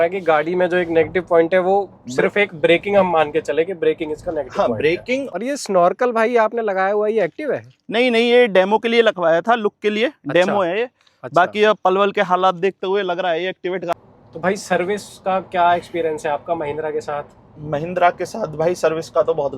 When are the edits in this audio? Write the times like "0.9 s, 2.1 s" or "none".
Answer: 5.3 s, 13.9 s